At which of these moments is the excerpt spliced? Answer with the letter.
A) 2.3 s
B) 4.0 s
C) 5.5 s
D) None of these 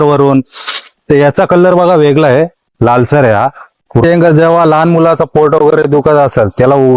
B